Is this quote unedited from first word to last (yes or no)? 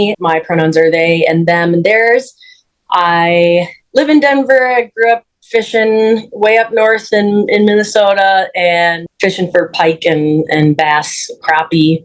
yes